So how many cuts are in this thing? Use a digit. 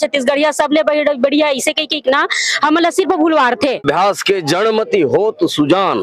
1